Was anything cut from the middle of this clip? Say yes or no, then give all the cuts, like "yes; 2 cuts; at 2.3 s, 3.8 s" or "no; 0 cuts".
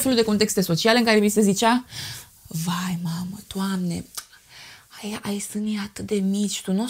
no; 0 cuts